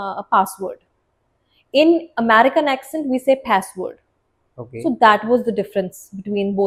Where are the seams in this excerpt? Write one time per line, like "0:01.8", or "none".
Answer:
none